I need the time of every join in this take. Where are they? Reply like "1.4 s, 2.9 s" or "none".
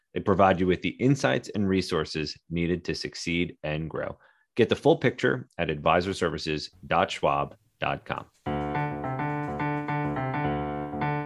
8.3 s